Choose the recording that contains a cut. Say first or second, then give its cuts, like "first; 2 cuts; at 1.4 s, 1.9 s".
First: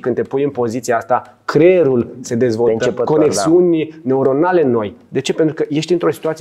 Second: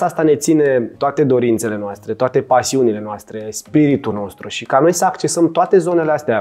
second; 1 cut; at 0.9 s